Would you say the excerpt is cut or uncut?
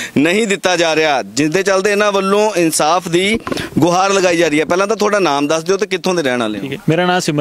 uncut